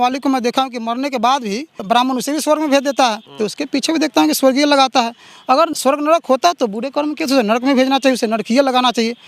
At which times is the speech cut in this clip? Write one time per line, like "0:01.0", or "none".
0:01.8
0:03.3
0:05.7